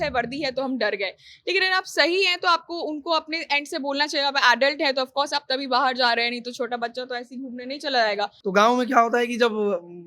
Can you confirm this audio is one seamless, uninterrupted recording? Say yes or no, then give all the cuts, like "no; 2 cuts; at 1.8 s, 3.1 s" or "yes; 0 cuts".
no; 1 cut; at 8.3 s